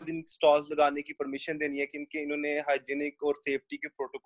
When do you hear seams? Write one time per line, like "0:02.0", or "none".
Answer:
none